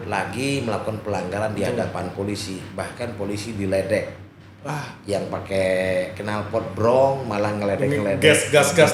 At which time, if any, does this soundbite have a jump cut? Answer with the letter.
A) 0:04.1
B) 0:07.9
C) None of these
C